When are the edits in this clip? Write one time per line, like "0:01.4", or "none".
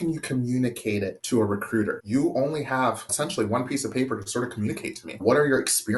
0:01.2
0:02.0
0:03.1
0:05.2